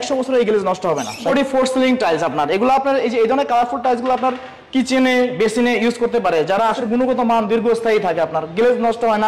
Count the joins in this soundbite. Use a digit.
2